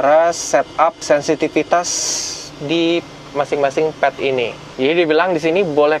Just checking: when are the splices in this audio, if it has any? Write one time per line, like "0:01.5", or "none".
0:04.6

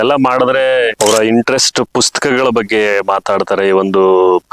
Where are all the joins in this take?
0:00.9

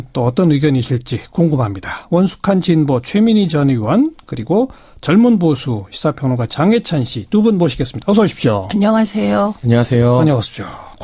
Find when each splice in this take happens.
none

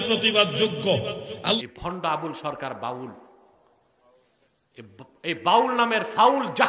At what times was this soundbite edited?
0:01.6

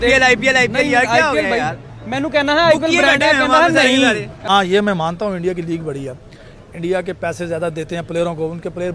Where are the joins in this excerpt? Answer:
0:04.3

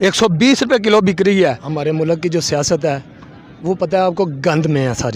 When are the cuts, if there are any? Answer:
0:01.7

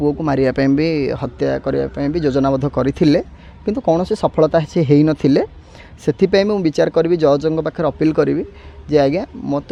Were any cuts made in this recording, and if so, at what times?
none

